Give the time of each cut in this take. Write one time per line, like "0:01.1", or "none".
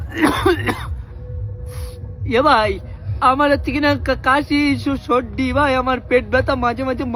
none